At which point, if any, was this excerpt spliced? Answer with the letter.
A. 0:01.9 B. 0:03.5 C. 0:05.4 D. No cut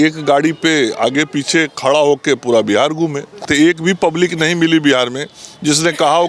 B